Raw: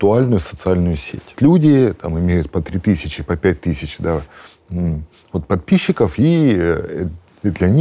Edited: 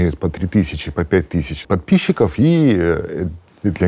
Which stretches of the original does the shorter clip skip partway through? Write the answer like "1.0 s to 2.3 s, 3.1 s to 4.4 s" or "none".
4.0 s to 5.4 s